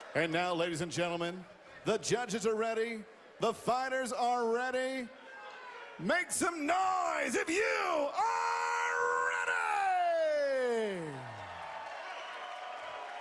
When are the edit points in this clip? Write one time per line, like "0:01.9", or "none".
0:08.4